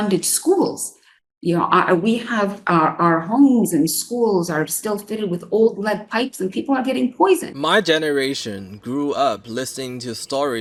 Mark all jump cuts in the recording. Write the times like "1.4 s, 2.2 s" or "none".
none